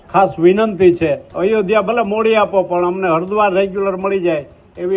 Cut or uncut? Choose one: cut